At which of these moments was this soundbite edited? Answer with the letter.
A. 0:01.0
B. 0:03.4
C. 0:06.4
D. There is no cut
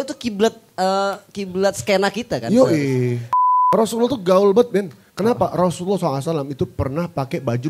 B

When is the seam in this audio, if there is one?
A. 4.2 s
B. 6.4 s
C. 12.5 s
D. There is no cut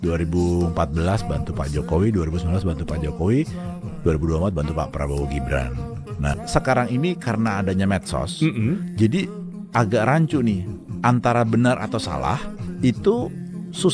B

